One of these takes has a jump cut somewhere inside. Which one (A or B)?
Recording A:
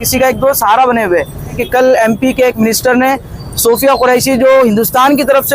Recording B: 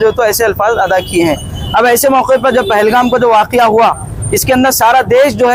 A